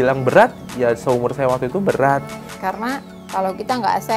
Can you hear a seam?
yes; 1 cut; at 2.3 s

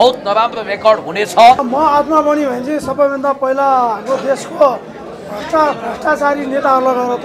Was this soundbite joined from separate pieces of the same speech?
yes; 1 cut; at 1.6 s

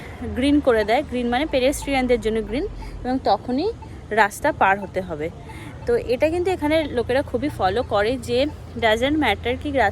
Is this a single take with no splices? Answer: yes; 0 cuts

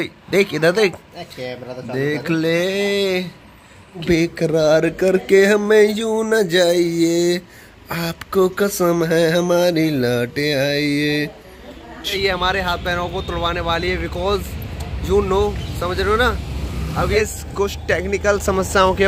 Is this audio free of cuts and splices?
no; 3 cuts; at 4.0 s, 12.1 s, 17.2 s

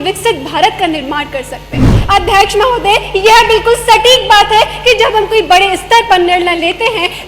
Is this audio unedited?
no; 1 cut; at 2.0 s

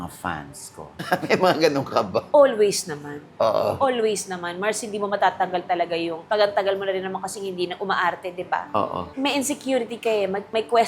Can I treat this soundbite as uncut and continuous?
yes; 0 cuts

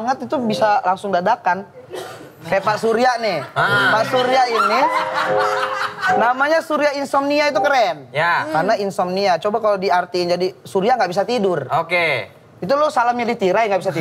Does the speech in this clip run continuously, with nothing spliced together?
yes; 0 cuts

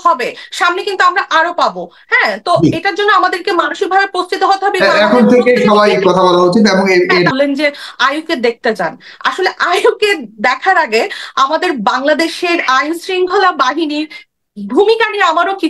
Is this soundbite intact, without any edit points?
no; 1 cut; at 7.3 s

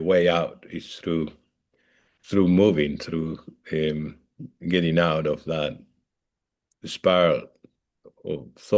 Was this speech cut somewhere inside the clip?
no; 0 cuts

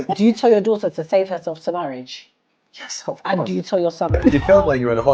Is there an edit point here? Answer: yes; 1 cut; at 4.2 s

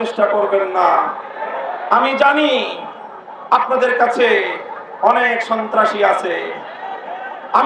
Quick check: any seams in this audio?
no; 0 cuts

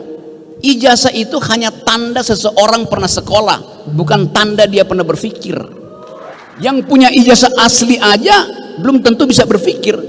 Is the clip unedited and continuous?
no; 1 cut; at 6.3 s

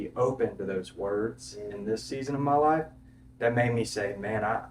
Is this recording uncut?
yes; 0 cuts

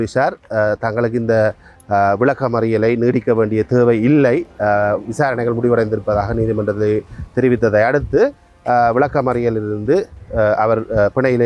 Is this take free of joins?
yes; 0 cuts

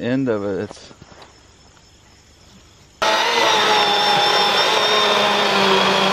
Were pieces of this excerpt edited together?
yes; 1 cut; at 3.0 s

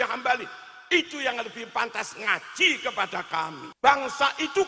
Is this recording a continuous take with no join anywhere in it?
no; 1 cut; at 3.7 s

